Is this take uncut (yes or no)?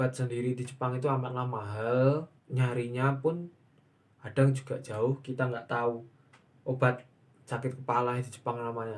no